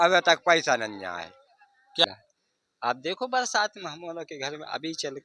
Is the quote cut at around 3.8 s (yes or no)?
no